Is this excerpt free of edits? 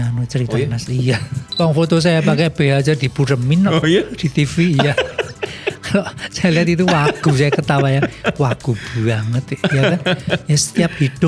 no; 1 cut; at 1.4 s

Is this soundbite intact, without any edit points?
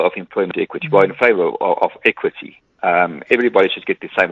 yes; 0 cuts

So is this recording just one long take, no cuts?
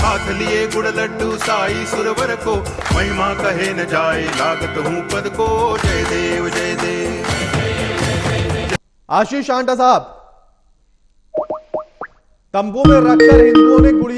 no; 1 cut; at 8.8 s

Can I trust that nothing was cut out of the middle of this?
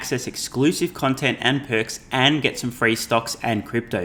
yes; 0 cuts

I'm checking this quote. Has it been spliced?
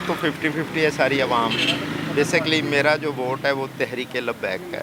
no; 0 cuts

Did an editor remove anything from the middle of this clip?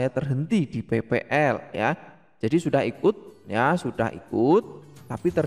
no; 0 cuts

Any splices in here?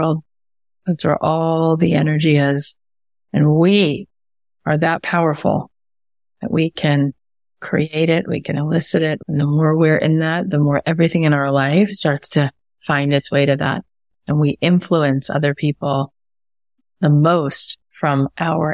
yes; 1 cut; at 9.2 s

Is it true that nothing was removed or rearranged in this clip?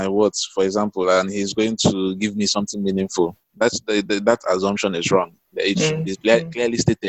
yes; 0 cuts

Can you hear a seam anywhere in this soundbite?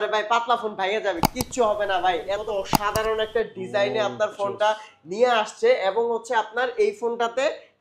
yes; 1 cut; at 2.4 s

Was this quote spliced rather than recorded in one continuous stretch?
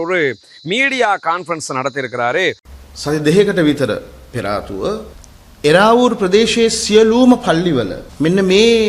yes; 1 cut; at 2.7 s

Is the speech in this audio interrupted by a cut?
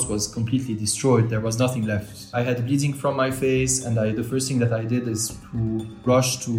no; 0 cuts

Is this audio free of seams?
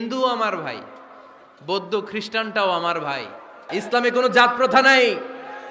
no; 1 cut; at 3.7 s

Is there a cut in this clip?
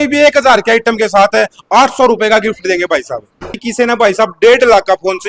yes; 1 cut; at 3.6 s

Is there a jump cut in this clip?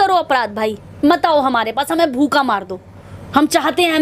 no; 0 cuts

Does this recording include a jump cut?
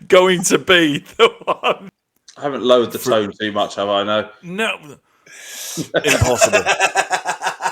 yes; 1 cut; at 1.9 s

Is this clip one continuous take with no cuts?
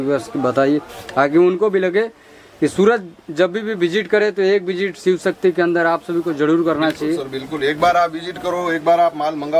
yes; 0 cuts

